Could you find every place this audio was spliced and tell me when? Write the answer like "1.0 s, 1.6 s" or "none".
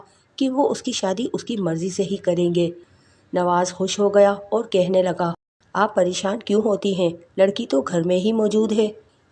5.6 s